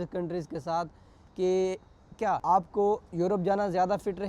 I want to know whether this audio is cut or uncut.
cut